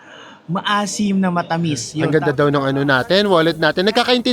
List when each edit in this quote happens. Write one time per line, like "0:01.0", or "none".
0:02.1